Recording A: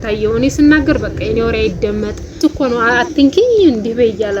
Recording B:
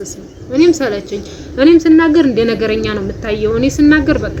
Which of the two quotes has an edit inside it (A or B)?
A